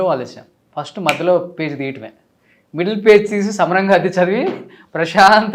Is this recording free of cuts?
yes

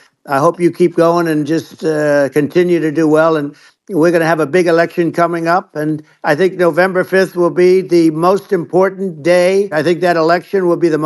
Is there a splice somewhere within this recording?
yes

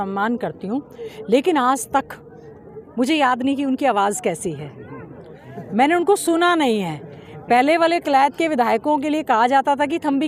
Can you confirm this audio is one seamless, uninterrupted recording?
yes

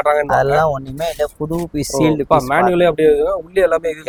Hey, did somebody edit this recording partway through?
no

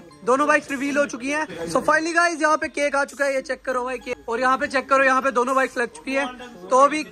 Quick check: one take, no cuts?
no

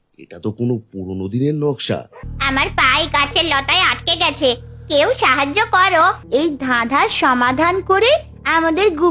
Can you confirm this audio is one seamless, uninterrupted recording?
no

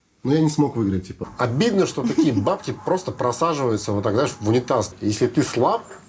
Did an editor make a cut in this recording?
yes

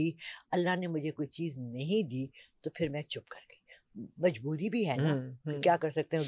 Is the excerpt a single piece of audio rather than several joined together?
yes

